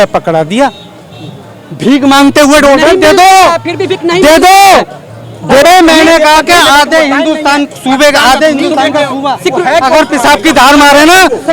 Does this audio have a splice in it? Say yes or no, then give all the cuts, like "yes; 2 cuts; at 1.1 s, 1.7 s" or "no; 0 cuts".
yes; 1 cut; at 5.6 s